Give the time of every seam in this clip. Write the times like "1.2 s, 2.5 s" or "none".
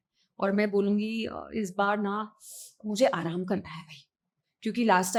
none